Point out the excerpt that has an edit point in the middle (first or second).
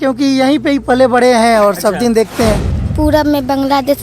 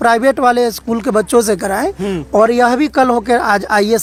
first